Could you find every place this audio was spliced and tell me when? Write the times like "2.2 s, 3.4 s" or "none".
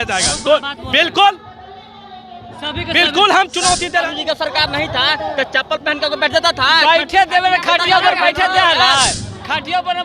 4.1 s